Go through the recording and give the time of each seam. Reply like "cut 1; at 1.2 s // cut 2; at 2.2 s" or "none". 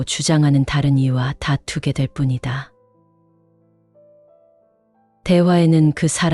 cut 1; at 2.7 s // cut 2; at 5.1 s

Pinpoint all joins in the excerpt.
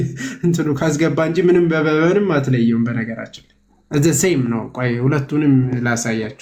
none

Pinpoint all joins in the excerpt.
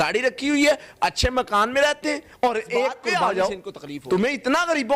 cut 1; at 3.1 s

